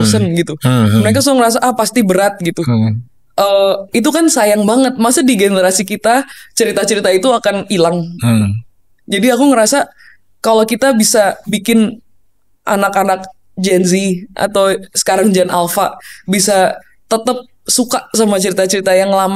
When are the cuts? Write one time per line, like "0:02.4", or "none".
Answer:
none